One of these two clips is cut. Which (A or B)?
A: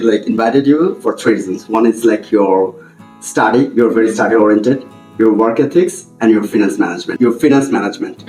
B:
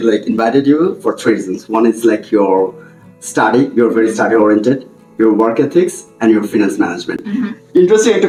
A